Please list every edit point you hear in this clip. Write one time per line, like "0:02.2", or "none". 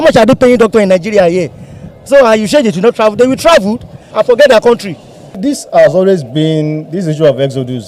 0:04.1
0:05.4